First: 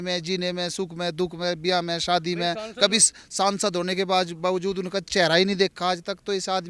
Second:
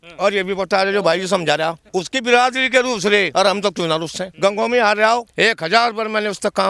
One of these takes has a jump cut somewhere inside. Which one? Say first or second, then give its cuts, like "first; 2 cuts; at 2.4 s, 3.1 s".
second; 4 cuts; at 1.8 s, 3.3 s, 4.2 s, 5.3 s